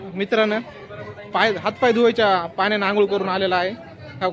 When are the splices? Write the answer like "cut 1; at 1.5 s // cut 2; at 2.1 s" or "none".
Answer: none